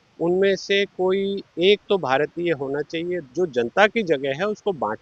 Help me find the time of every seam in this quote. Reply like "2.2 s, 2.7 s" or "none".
3.2 s